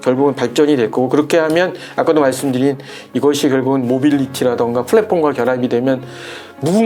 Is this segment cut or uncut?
uncut